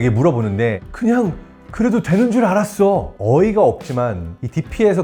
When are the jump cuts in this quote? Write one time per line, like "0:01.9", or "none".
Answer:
none